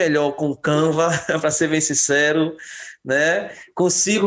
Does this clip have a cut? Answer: no; 0 cuts

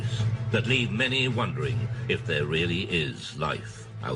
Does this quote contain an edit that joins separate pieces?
no; 0 cuts

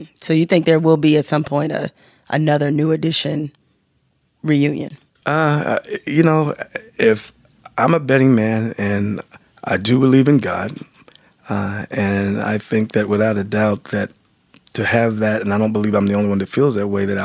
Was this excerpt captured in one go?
yes; 0 cuts

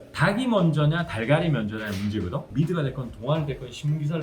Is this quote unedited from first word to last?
no; 1 cut; at 2.5 s

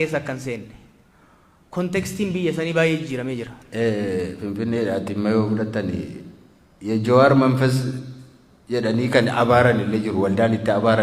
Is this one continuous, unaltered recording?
no; 1 cut; at 3.6 s

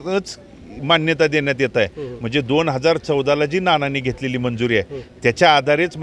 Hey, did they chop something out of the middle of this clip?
no; 0 cuts

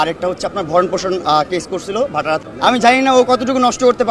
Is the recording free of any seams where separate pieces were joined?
no; 1 cut; at 2.4 s

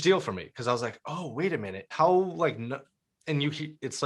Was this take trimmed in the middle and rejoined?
yes; 1 cut; at 1.8 s

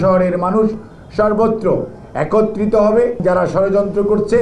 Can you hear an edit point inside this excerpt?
yes; 1 cut; at 3.2 s

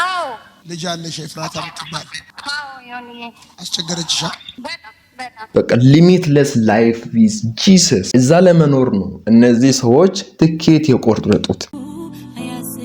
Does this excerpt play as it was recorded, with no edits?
no; 2 cuts; at 5.4 s, 11.6 s

